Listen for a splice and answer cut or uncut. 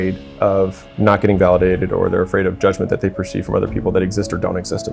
cut